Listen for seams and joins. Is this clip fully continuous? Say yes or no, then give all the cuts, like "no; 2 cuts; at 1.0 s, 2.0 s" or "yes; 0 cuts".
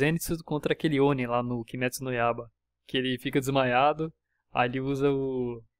yes; 0 cuts